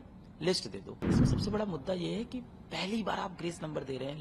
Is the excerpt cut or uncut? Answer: cut